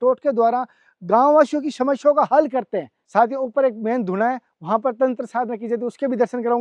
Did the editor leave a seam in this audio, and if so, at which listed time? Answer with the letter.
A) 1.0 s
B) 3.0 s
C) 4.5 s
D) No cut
B